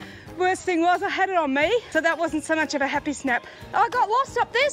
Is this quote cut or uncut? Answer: cut